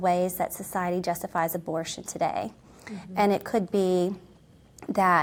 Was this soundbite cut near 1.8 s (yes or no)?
no